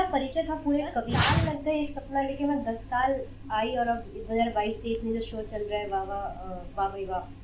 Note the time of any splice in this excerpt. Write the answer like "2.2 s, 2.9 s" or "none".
1.2 s